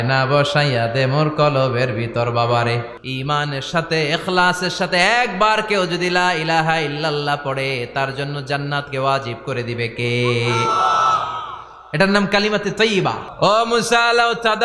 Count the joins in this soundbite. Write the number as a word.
two